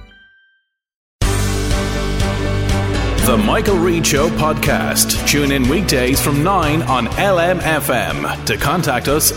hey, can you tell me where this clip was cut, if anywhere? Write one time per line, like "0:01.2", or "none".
0:01.1